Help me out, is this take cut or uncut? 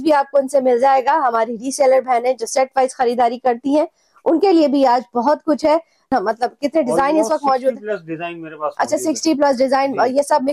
cut